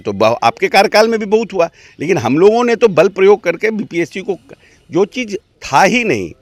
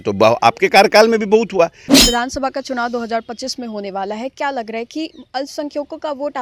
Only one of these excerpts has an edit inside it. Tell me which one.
second; 1 cut; at 2.0 s

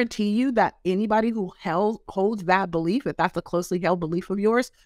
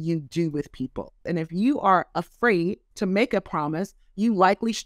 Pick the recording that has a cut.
second; 2 cuts; at 1.2 s, 2.9 s

